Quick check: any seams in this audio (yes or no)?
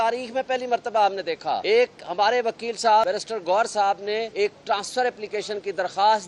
yes